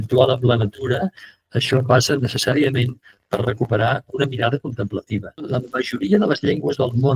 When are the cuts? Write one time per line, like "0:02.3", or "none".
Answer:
0:05.6